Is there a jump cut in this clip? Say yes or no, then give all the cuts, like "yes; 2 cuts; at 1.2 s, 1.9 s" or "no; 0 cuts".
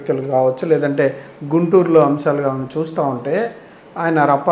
no; 0 cuts